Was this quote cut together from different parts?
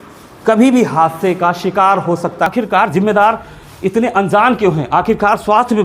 yes; 1 cut; at 2.5 s

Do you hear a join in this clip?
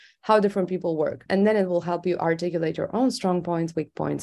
no; 0 cuts

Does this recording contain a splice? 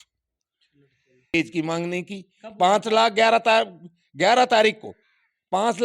yes; 1 cut; at 1.3 s

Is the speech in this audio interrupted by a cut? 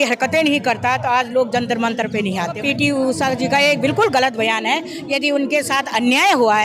yes; 1 cut; at 2.6 s

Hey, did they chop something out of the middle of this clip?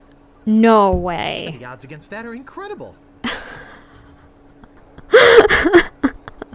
yes; 1 cut; at 4.7 s

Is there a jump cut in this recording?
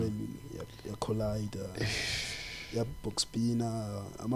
no; 0 cuts

